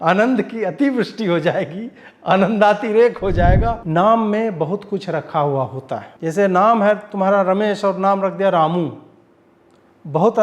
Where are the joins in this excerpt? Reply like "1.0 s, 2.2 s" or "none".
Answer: 3.8 s, 6.1 s